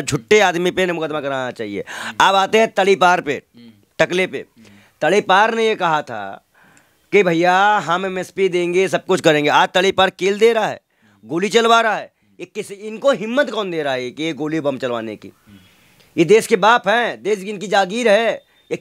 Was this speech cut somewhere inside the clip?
no; 0 cuts

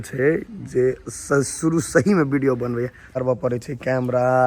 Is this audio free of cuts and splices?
no; 1 cut; at 3.0 s

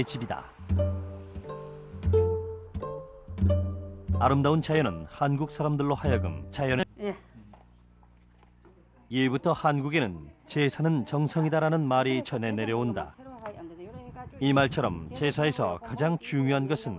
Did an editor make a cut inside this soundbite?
no; 0 cuts

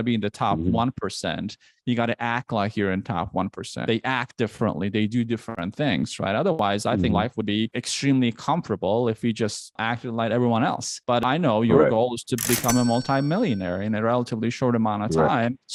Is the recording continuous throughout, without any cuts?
yes; 0 cuts

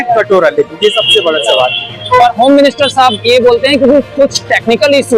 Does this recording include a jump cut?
yes; 1 cut; at 2.2 s

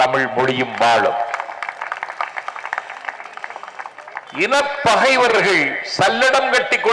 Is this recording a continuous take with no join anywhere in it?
yes; 0 cuts

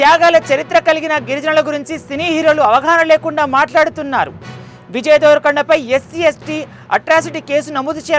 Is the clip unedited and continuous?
yes; 0 cuts

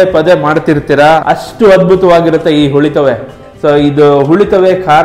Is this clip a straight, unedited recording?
no; 1 cut; at 3.3 s

